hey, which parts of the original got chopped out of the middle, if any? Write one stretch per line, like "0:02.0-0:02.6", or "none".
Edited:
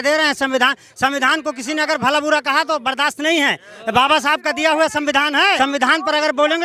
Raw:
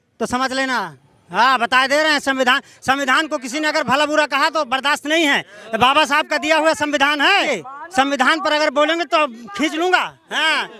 0:07.4-0:07.9